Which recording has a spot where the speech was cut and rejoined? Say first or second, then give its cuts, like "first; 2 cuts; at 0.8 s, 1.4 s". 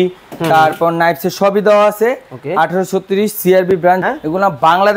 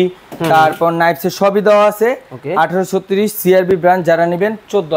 first; 1 cut; at 4.0 s